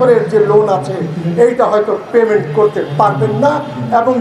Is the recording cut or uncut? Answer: uncut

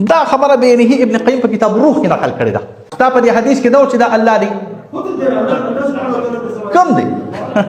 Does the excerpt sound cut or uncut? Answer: cut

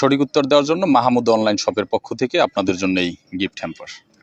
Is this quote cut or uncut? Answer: uncut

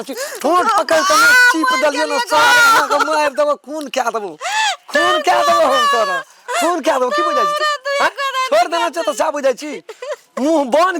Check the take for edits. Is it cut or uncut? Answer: uncut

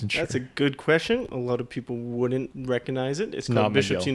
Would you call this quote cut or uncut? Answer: cut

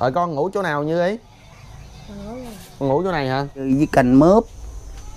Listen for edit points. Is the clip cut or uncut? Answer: cut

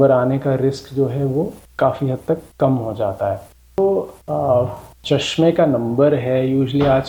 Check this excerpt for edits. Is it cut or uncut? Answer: cut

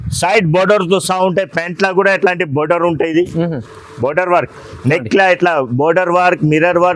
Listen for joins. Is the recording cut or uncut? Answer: uncut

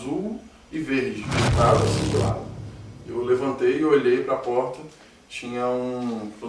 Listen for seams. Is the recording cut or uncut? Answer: cut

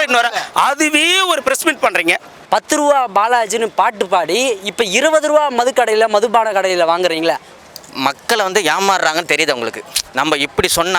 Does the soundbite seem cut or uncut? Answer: cut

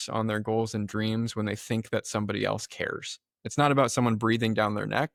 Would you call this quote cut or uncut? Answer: uncut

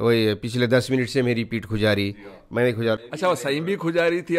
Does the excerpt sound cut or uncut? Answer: uncut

